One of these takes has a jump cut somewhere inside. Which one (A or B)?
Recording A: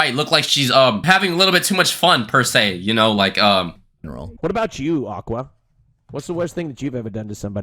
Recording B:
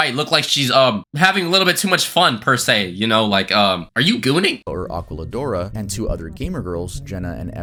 A